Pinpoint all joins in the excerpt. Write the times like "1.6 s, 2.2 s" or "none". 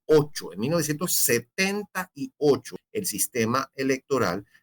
2.8 s